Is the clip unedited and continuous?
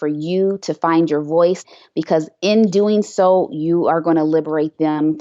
no; 1 cut; at 1.7 s

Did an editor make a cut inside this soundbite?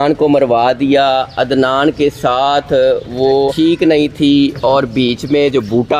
yes; 1 cut; at 3.5 s

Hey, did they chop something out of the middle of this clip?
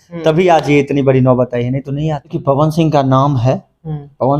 yes; 1 cut; at 2.3 s

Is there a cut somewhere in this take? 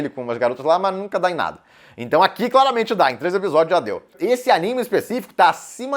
yes; 1 cut; at 4.0 s

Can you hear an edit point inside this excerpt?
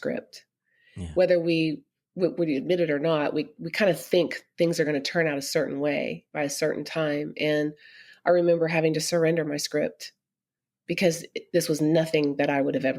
no; 0 cuts

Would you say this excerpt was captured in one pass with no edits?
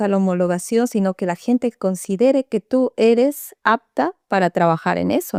yes; 0 cuts

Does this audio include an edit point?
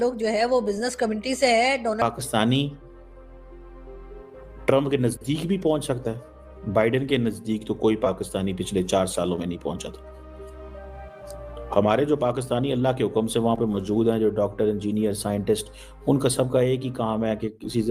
yes; 1 cut; at 2.0 s

